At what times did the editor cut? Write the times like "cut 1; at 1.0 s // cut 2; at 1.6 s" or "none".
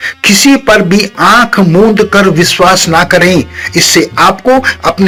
none